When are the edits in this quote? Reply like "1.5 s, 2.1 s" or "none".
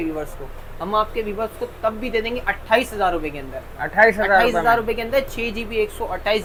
none